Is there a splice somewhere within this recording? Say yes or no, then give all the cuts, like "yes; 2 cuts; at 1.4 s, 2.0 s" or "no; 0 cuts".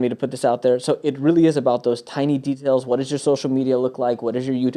no; 0 cuts